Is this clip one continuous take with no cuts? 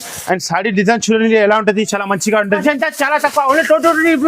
no; 1 cut; at 2.6 s

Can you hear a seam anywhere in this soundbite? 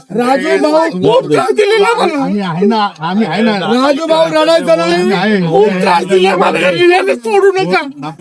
no; 0 cuts

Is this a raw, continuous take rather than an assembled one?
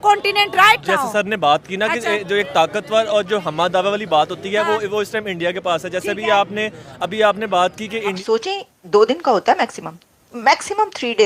no; 1 cut; at 8.2 s

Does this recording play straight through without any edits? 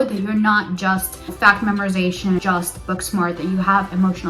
no; 2 cuts; at 1.3 s, 2.4 s

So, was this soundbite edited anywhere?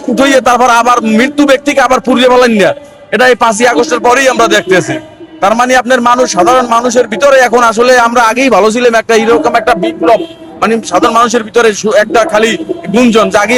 no; 0 cuts

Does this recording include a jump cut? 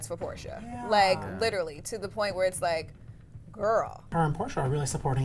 yes; 1 cut; at 4.1 s

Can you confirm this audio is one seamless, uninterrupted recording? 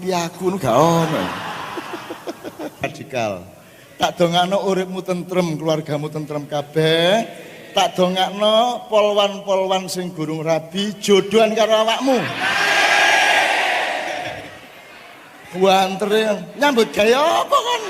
no; 1 cut; at 2.9 s

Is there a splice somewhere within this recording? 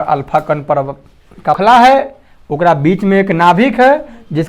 yes; 1 cut; at 1.6 s

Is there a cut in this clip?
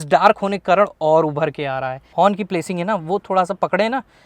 yes; 1 cut; at 2.0 s

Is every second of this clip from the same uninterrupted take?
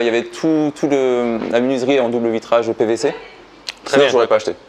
yes; 0 cuts

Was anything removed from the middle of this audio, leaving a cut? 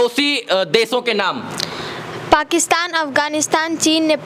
no; 0 cuts

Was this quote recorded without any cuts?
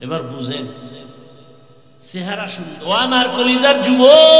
no; 1 cut; at 2.7 s

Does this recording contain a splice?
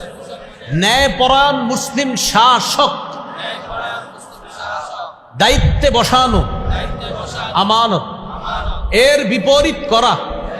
no; 0 cuts

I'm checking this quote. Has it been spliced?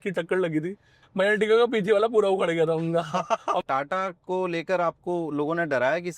yes; 1 cut; at 3.6 s

